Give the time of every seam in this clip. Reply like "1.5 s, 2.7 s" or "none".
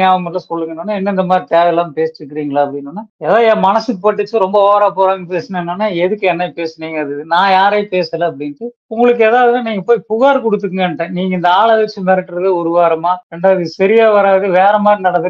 none

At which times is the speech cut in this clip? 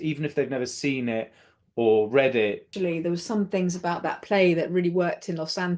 2.7 s

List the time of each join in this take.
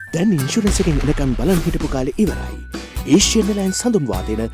none

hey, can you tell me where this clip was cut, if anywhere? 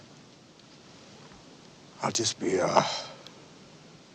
none

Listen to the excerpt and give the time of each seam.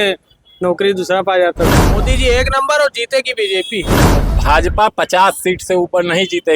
1.8 s, 4.0 s

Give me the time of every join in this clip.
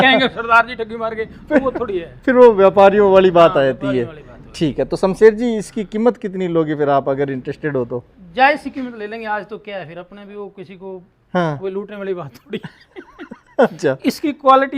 none

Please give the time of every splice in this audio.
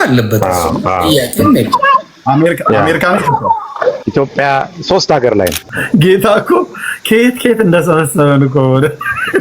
4.0 s, 5.7 s

